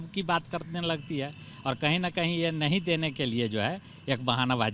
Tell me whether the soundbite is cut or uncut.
uncut